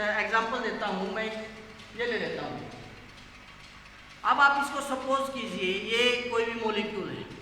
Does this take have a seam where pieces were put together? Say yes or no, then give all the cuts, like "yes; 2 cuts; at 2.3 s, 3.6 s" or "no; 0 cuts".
no; 0 cuts